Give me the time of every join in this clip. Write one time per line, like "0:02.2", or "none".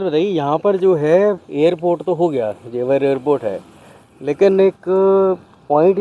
0:01.5